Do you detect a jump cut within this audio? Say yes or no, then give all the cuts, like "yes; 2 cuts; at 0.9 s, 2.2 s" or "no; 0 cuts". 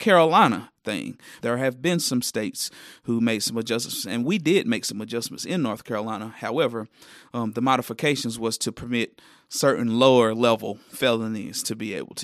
yes; 1 cut; at 1.3 s